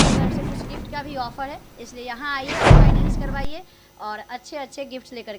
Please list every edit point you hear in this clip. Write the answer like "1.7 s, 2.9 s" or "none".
0.8 s, 2.5 s, 3.4 s

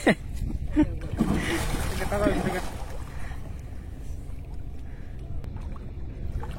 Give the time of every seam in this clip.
5.4 s

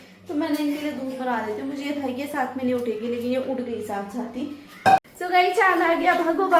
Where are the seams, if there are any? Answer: 5.0 s

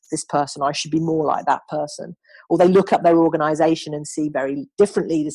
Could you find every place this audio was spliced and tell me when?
none

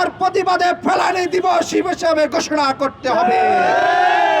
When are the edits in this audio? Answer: none

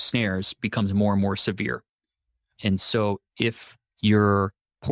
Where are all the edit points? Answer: none

